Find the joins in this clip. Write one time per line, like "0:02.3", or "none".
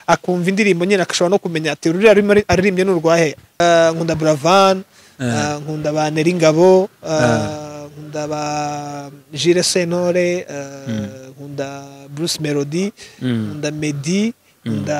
0:03.5